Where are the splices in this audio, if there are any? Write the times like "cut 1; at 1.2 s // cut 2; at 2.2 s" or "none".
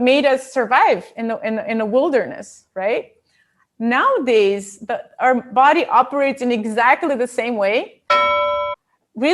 cut 1; at 8.4 s